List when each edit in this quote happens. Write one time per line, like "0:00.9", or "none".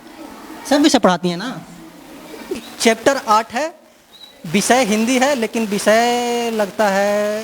0:02.6